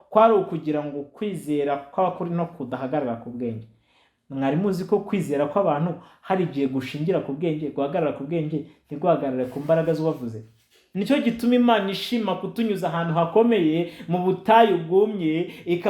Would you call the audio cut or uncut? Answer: cut